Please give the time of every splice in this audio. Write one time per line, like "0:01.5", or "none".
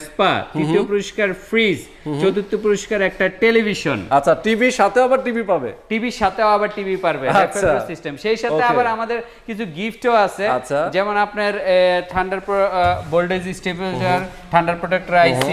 none